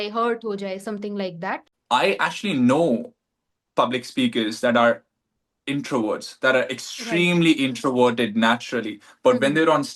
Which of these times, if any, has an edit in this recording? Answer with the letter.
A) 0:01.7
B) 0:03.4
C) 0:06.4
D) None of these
A